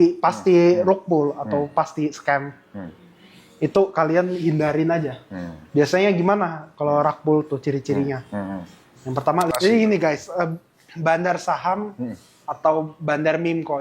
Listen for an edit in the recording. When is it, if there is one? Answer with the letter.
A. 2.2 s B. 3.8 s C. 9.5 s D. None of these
C